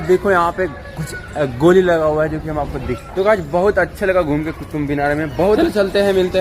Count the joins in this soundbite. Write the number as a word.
two